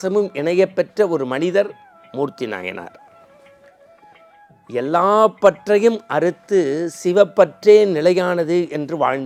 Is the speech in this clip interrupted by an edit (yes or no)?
no